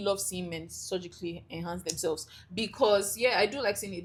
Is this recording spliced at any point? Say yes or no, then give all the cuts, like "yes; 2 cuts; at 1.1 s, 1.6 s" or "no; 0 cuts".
no; 0 cuts